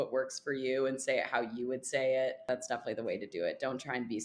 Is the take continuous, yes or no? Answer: no